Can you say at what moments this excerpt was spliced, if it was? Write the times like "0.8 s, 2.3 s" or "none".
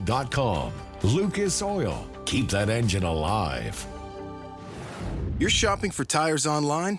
5.3 s